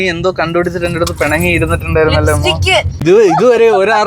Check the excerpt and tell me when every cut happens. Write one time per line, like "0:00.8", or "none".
0:03.0